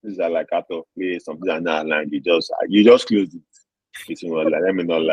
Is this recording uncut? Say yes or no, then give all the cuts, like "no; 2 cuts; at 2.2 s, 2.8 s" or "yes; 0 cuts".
yes; 0 cuts